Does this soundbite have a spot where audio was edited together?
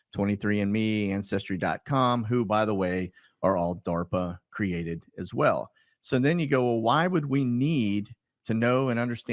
no; 0 cuts

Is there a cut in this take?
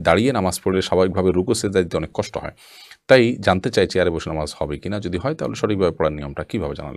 no; 0 cuts

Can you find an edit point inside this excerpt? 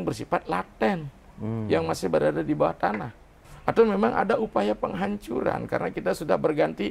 yes; 1 cut; at 3.5 s

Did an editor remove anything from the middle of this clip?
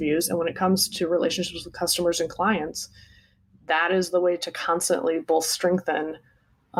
no; 0 cuts

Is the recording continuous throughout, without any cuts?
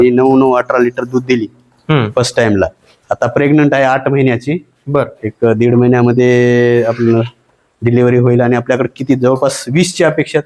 yes; 0 cuts

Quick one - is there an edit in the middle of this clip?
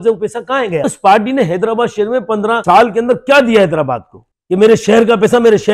yes; 3 cuts; at 0.8 s, 2.6 s, 4.3 s

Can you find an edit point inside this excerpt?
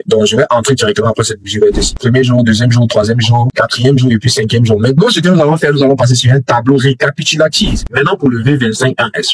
yes; 2 cuts; at 1.9 s, 7.8 s

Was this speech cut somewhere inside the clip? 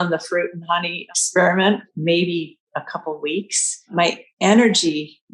yes; 2 cuts; at 1.0 s, 1.9 s

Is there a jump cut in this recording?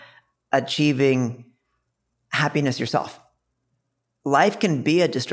yes; 1 cut; at 3.6 s

